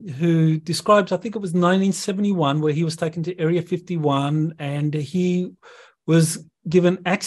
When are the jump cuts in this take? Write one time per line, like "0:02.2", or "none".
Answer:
none